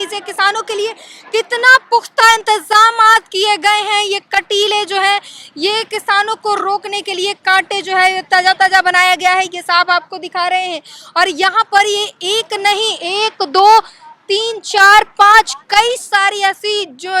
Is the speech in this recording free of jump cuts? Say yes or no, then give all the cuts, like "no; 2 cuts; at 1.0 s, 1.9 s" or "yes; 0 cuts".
yes; 0 cuts